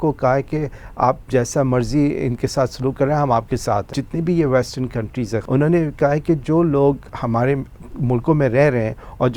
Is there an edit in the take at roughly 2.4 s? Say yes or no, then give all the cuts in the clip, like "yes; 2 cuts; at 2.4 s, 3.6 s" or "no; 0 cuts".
no; 3 cuts; at 3.9 s, 5.4 s, 7.1 s